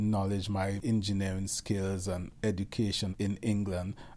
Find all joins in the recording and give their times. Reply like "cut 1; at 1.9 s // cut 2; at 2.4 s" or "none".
cut 1; at 0.8 s // cut 2; at 2.3 s // cut 3; at 3.1 s